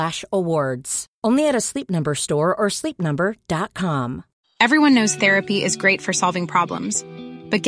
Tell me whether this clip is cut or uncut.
cut